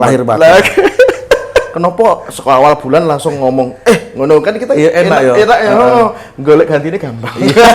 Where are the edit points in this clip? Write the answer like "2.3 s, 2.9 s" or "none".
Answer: 1.7 s